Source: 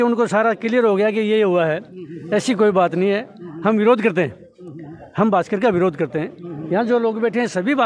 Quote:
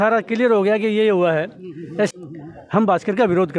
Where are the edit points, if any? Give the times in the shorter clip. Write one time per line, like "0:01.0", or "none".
0:02.1